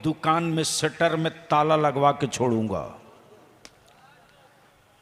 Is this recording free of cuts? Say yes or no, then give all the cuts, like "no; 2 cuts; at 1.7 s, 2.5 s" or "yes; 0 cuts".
yes; 0 cuts